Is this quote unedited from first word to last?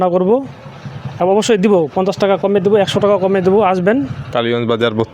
no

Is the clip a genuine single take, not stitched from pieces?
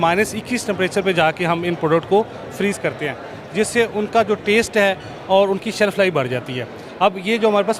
yes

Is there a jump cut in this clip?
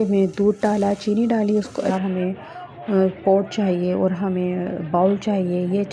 yes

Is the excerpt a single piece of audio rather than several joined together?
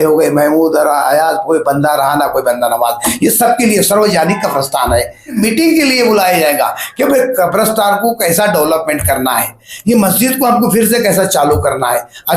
no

